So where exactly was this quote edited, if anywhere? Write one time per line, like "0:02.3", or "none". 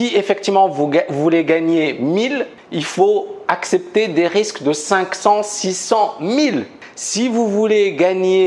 0:07.3